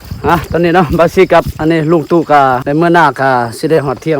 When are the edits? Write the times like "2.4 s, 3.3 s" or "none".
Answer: 2.6 s